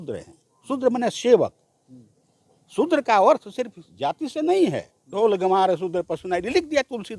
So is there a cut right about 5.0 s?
yes; 1 cut; at 5.0 s

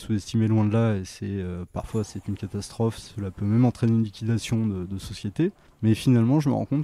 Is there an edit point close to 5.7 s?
yes; 1 cut; at 5.7 s

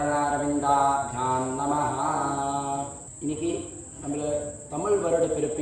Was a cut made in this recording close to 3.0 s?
yes; 1 cut; at 3.0 s

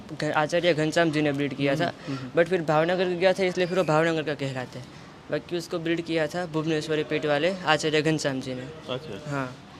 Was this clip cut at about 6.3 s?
no; 0 cuts

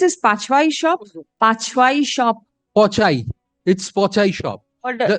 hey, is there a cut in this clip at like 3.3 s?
no; 1 cut; at 1.2 s

